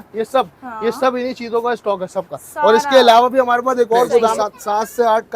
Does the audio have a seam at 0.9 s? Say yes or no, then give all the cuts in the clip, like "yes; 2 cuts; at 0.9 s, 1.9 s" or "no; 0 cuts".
no; 1 cut; at 4.4 s